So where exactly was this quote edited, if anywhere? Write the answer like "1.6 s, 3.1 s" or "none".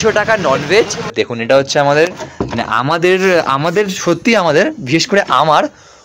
1.1 s